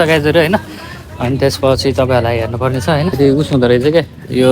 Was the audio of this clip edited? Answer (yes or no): yes